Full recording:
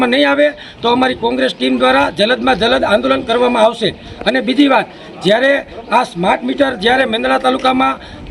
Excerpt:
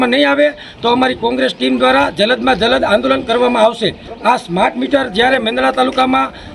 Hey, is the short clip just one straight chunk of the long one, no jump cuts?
no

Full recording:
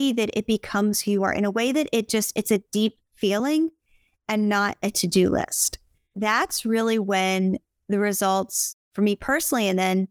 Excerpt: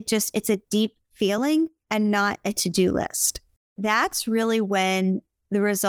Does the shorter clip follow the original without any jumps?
no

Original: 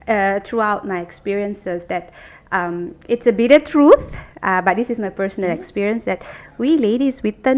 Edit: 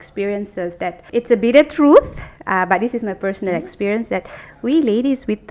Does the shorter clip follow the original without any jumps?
no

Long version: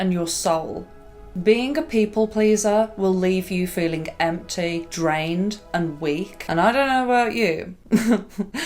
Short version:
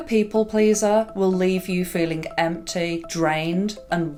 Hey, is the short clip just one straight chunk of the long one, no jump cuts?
yes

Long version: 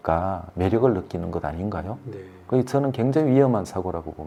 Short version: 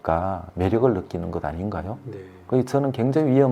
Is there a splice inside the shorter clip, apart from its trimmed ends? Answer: no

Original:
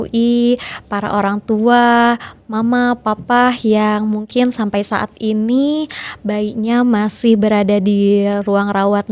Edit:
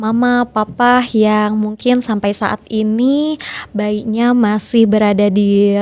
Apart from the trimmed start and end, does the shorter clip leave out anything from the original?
no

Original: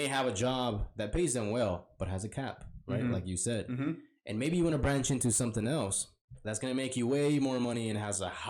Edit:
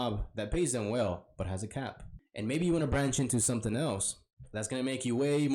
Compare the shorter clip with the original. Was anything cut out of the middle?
yes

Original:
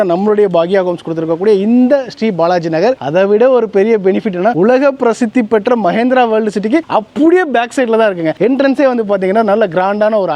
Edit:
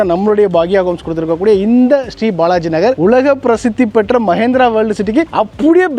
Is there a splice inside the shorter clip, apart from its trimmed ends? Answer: yes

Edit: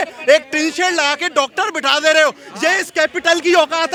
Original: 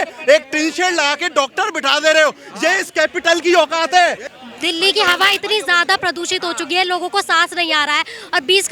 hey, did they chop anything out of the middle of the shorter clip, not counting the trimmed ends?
no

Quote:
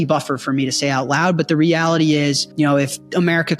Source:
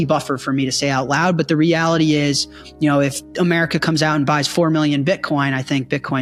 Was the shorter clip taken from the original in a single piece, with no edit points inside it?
no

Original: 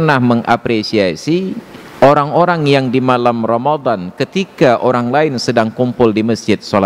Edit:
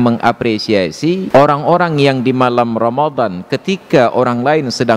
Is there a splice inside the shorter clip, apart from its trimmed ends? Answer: yes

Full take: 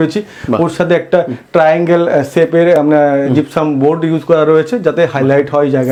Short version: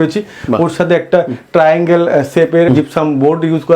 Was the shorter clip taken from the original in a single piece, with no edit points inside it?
no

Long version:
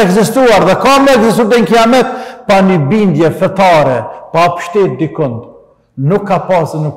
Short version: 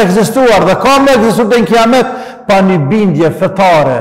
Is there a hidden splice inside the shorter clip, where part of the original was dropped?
no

